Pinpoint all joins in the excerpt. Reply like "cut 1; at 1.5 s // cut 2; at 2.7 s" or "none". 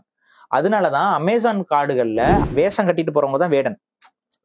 cut 1; at 2.4 s